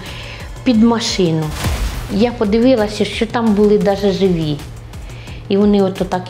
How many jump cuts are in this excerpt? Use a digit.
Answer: 1